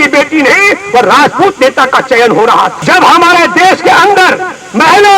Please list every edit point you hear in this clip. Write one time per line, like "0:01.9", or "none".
0:02.8